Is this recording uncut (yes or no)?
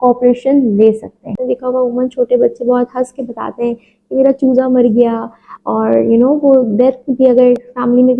no